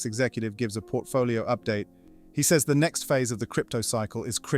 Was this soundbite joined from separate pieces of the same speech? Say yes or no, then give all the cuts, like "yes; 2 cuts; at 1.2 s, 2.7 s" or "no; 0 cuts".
yes; 1 cut; at 2.0 s